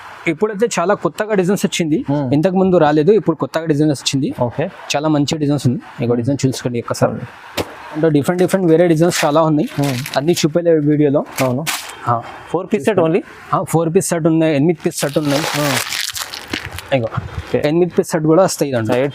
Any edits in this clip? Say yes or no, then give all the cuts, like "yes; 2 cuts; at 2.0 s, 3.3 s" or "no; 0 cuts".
yes; 1 cut; at 8.0 s